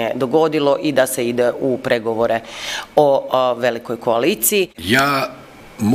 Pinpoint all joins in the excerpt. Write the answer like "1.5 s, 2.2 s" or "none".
4.8 s